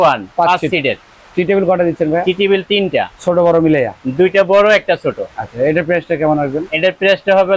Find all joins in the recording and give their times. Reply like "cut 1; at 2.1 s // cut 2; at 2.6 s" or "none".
none

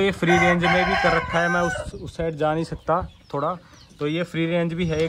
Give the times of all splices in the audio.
none

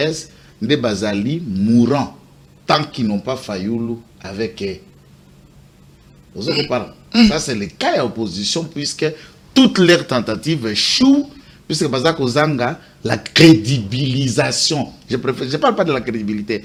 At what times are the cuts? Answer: none

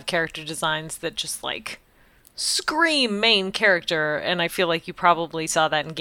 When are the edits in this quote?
none

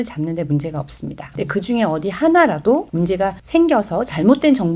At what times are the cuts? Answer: cut 1; at 1.3 s // cut 2; at 3.2 s

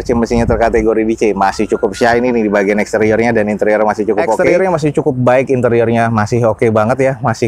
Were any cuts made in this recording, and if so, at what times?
cut 1; at 4.4 s

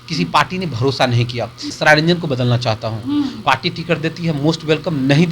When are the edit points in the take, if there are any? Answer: cut 1; at 1.7 s // cut 2; at 3.4 s

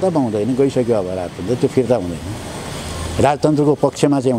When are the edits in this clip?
none

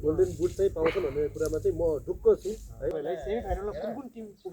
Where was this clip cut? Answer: cut 1; at 3.0 s

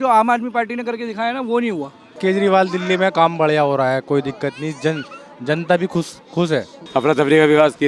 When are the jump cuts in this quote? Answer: cut 1; at 2.0 s // cut 2; at 6.9 s

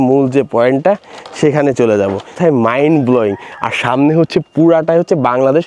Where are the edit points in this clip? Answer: cut 1; at 2.3 s

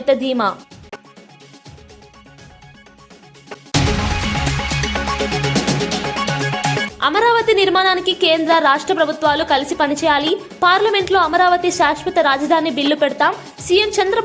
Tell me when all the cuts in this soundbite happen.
cut 1; at 3.6 s

